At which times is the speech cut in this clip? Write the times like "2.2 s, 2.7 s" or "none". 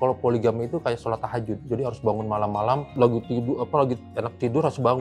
2.9 s